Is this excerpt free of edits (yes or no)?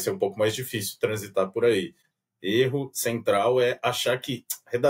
no